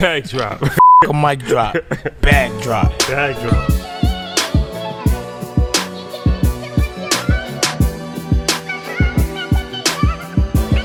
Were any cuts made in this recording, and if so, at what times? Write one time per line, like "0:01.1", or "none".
none